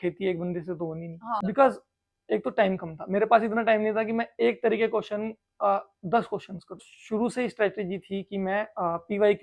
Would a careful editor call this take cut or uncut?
cut